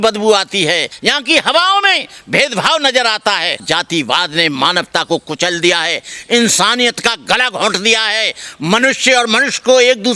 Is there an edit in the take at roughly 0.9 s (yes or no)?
yes